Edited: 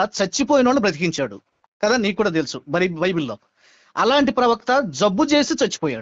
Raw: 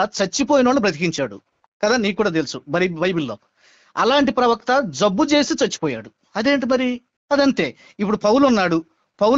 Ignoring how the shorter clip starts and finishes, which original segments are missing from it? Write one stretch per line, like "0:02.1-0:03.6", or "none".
none